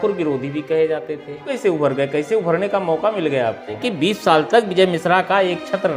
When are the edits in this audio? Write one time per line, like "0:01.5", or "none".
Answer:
0:01.5
0:03.9